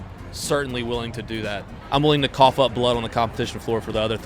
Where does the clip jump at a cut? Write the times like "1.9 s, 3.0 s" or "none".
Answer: 1.7 s